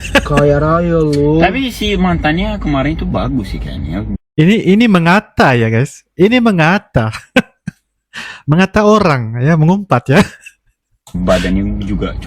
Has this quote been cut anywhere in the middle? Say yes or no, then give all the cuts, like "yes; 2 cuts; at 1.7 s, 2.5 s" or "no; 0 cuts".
no; 0 cuts